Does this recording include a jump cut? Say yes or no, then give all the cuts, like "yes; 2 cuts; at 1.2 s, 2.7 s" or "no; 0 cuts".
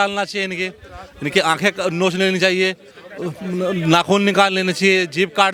no; 0 cuts